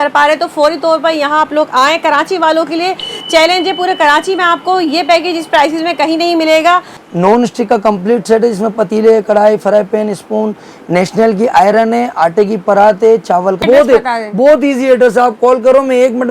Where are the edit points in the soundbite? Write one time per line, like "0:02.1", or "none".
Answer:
0:07.0
0:13.6